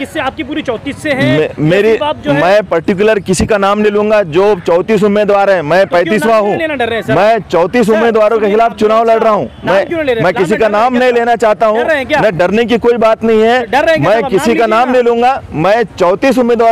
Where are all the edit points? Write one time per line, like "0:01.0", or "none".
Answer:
none